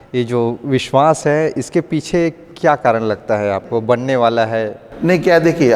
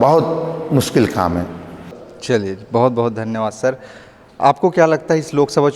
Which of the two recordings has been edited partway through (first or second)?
second